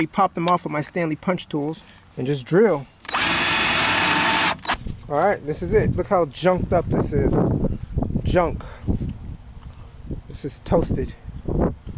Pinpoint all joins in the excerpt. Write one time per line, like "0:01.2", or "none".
0:04.8